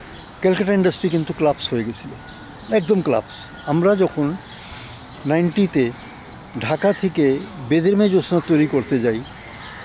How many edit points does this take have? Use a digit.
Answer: 0